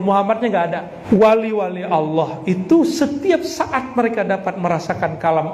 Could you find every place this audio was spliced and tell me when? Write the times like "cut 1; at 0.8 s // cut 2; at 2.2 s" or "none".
cut 1; at 0.9 s